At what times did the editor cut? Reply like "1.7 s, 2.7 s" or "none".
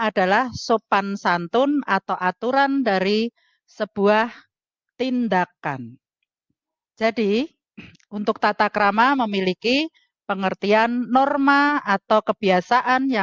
none